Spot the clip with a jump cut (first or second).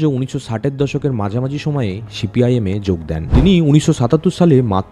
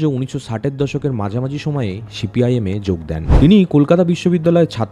first